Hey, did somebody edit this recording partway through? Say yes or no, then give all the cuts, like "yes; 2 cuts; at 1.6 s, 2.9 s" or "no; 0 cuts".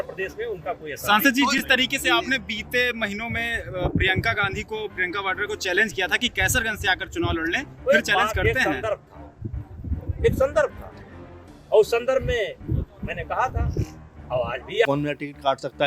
yes; 1 cut; at 14.9 s